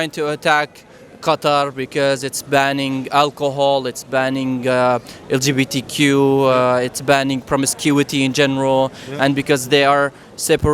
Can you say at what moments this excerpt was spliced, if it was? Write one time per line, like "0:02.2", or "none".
none